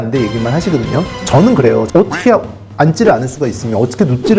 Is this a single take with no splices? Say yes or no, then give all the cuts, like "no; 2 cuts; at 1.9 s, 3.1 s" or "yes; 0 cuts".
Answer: no; 1 cut; at 1.9 s